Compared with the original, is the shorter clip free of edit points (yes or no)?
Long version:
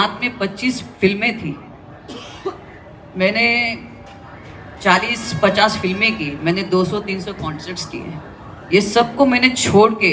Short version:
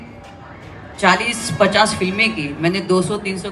yes